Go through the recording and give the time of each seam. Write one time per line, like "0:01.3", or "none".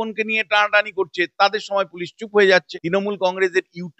0:02.8